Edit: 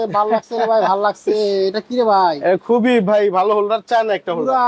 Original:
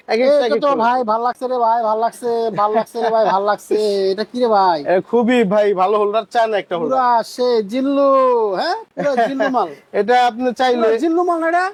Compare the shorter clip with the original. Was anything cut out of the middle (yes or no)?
no